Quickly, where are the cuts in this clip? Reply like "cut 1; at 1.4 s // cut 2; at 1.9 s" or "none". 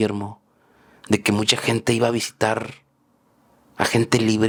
none